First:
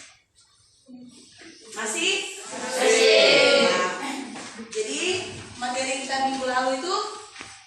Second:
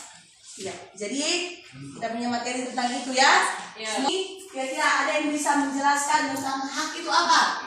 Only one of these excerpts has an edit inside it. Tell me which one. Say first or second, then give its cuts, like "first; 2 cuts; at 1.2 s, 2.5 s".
second; 1 cut; at 4.1 s